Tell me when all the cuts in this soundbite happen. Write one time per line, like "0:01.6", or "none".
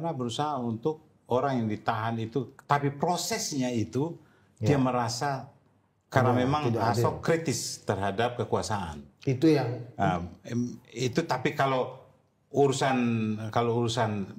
none